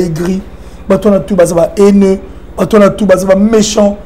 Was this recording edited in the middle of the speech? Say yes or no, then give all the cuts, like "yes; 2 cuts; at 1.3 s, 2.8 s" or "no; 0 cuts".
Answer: no; 0 cuts